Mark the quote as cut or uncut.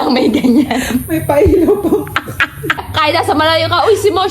cut